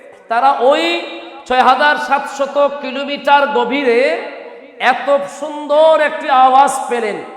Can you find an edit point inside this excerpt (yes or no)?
no